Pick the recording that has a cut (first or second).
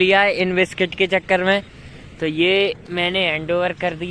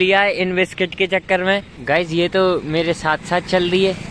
second